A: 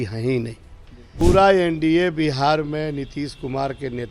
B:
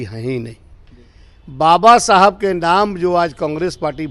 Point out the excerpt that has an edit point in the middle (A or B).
A